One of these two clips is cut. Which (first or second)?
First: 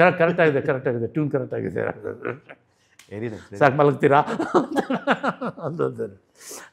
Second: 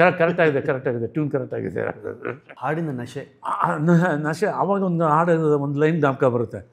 second